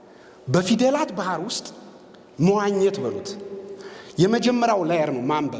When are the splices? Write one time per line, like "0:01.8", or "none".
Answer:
none